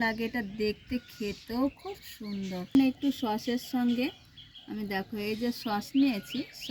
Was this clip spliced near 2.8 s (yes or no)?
yes